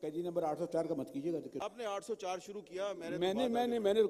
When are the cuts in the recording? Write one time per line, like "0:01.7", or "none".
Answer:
0:01.7